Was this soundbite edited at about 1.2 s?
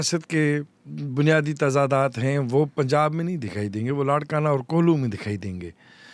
no; 0 cuts

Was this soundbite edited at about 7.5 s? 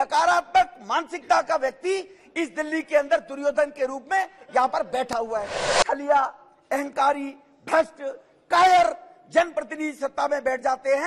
no; 1 cut; at 5.6 s

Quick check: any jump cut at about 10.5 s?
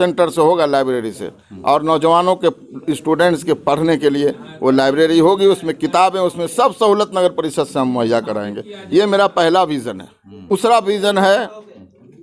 yes; 1 cut; at 10.5 s

